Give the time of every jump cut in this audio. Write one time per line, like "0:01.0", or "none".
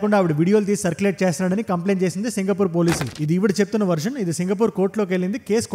0:03.1